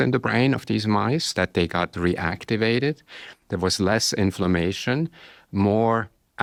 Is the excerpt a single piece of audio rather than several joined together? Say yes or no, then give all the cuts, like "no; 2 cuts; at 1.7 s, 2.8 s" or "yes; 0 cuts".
yes; 0 cuts